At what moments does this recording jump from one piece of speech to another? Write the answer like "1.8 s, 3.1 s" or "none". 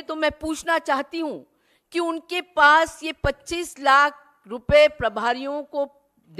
none